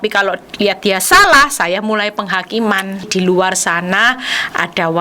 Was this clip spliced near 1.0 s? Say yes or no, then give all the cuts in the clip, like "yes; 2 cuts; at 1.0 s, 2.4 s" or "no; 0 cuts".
no; 1 cut; at 3.1 s